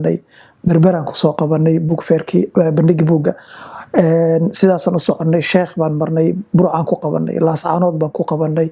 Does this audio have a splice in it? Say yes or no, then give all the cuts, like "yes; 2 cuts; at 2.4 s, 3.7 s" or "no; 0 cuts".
no; 0 cuts